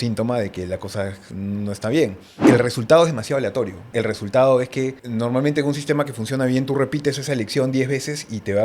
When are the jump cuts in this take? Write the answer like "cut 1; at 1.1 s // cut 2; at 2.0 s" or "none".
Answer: cut 1; at 2.4 s // cut 2; at 3.8 s // cut 3; at 5.0 s